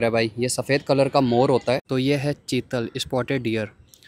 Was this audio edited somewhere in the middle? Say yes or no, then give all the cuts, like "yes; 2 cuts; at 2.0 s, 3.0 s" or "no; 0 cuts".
yes; 1 cut; at 1.8 s